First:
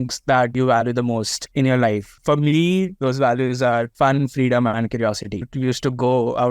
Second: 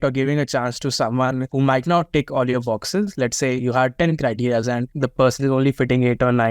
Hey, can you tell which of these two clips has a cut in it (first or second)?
first